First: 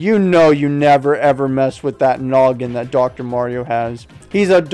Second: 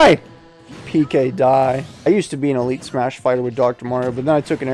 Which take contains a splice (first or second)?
second